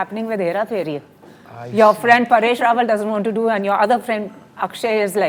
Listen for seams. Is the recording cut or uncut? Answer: uncut